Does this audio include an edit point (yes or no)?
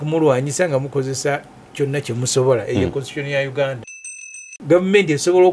yes